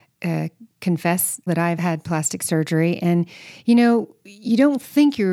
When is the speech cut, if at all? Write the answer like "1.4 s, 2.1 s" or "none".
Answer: 1.8 s